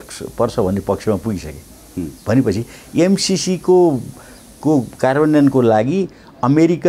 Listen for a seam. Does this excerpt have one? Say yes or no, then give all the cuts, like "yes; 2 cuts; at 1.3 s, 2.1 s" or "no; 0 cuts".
no; 0 cuts